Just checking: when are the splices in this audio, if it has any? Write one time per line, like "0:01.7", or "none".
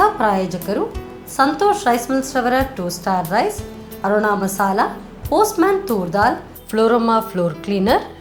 none